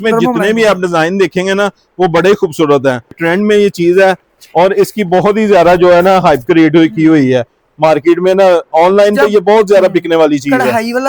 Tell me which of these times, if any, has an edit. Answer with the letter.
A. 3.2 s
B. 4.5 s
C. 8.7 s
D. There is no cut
A